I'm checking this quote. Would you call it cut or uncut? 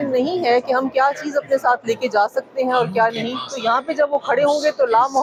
uncut